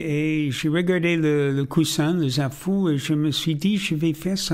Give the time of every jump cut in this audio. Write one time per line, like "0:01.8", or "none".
none